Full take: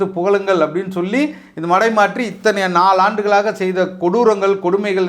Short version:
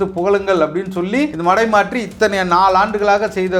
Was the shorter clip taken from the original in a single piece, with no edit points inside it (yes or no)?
no